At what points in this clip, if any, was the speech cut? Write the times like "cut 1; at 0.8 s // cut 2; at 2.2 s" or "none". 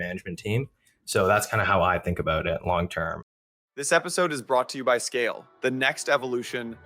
cut 1; at 3.2 s